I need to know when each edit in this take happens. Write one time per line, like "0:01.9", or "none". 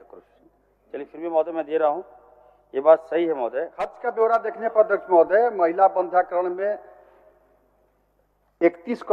0:04.0